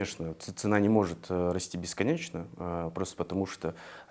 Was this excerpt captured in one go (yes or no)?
yes